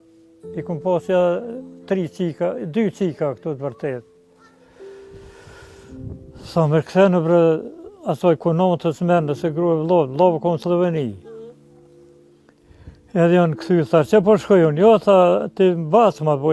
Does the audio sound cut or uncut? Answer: cut